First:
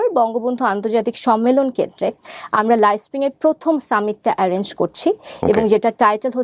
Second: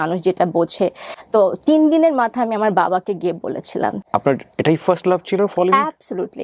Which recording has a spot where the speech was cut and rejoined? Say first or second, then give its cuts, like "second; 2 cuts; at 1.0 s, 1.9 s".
second; 2 cuts; at 1.1 s, 4.0 s